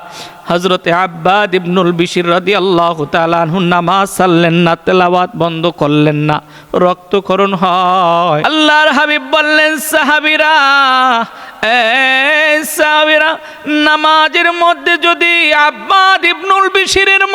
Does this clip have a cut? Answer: yes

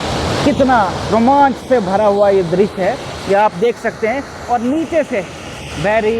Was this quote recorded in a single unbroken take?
yes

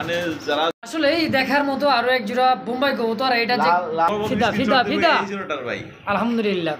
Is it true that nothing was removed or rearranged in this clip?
no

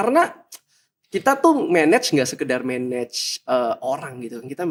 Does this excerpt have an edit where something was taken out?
no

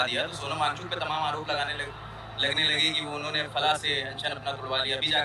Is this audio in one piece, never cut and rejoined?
yes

